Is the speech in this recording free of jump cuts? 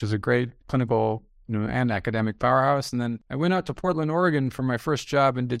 no; 1 cut; at 3.2 s

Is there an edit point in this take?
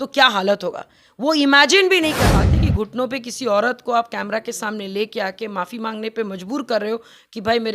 yes; 1 cut; at 2.4 s

